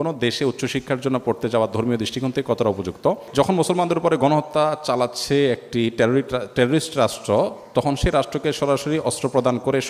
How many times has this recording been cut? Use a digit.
1